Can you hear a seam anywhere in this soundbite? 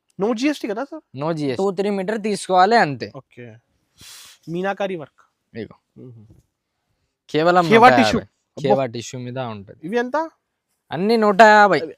yes; 1 cut; at 1.6 s

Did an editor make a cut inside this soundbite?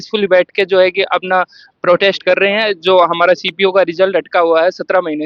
no; 0 cuts

